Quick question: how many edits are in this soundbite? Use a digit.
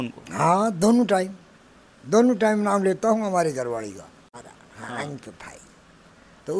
1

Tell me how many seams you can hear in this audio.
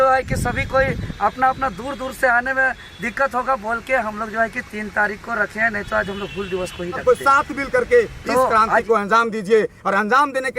1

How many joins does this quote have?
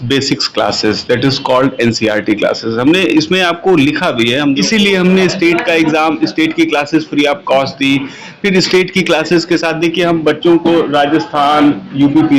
1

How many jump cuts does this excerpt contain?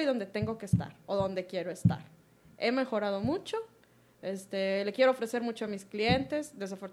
0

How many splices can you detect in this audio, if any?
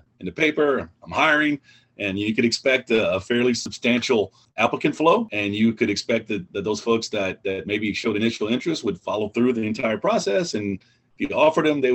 2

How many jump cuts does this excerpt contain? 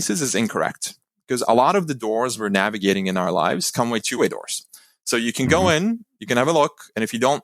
1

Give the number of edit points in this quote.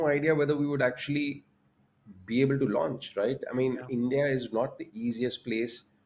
0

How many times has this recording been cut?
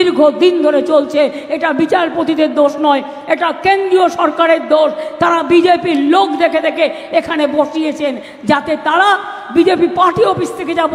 0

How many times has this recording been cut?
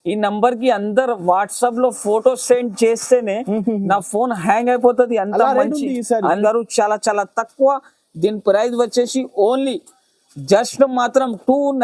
1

